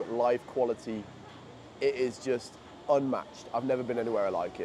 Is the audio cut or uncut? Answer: uncut